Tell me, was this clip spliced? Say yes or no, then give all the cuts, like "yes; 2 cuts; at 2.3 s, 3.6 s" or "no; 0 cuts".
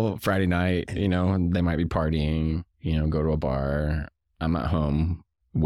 no; 0 cuts